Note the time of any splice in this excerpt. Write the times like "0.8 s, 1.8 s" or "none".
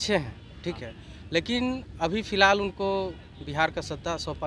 none

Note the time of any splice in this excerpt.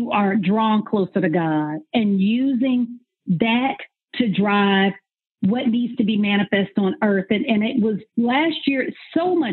8.1 s

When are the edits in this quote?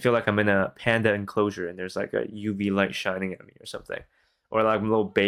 none

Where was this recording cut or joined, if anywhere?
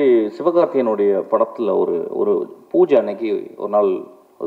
none

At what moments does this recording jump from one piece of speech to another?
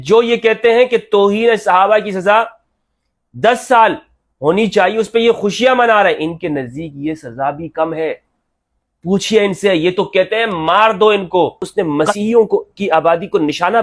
11.6 s

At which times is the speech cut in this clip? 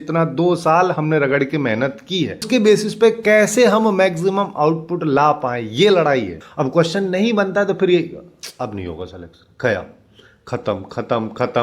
2.4 s, 6.4 s

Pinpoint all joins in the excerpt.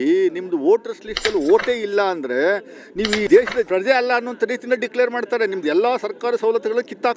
none

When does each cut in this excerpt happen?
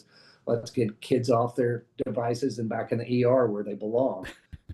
none

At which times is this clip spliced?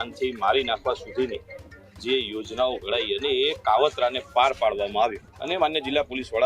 5.3 s

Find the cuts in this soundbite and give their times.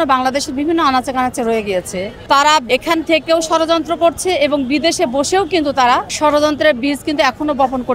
2.1 s, 2.7 s, 6.1 s

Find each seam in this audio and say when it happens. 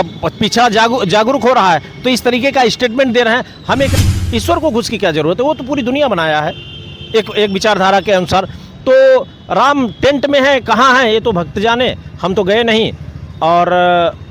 3.9 s

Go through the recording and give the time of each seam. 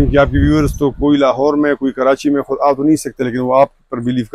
none

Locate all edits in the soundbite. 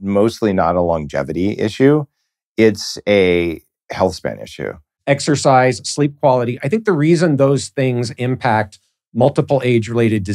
4.9 s

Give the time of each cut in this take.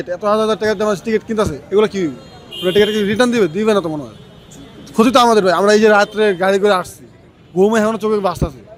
none

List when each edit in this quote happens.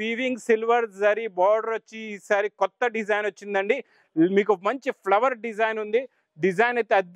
none

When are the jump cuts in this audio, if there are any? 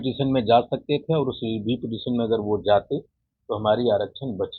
none

